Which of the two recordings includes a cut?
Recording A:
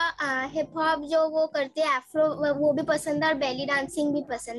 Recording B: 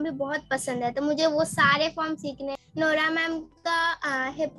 B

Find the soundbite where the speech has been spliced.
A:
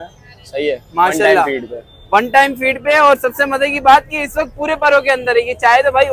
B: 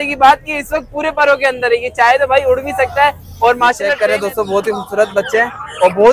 B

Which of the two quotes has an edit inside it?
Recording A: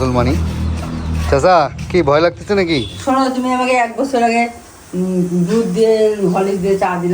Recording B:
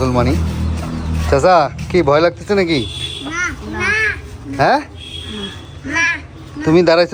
A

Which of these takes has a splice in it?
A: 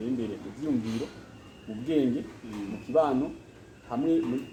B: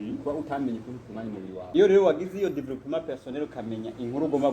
B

